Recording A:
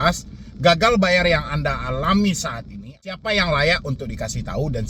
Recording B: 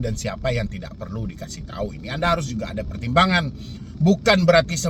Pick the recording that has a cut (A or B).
A